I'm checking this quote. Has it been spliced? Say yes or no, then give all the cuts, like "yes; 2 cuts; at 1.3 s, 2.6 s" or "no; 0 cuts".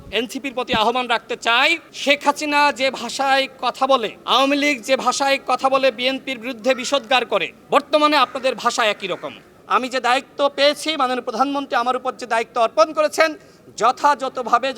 yes; 4 cuts; at 1.9 s, 4.1 s, 7.6 s, 9.5 s